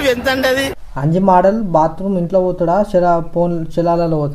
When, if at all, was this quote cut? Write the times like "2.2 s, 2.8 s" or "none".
1.1 s